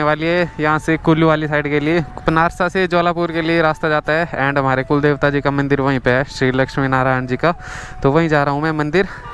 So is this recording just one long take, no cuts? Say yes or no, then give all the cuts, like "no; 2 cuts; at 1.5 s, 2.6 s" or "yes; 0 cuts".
yes; 0 cuts